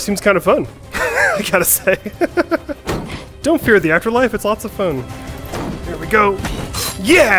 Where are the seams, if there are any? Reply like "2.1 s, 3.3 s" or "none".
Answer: 2.7 s